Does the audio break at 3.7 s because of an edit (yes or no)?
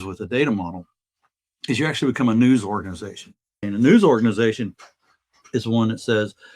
yes